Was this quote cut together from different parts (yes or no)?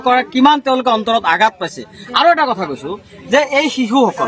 no